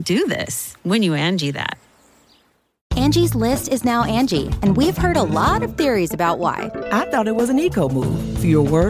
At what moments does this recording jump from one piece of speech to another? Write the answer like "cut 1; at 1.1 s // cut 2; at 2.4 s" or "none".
cut 1; at 2.8 s